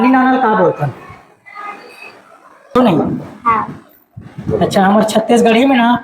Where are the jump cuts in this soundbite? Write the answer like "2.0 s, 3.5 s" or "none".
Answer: 2.7 s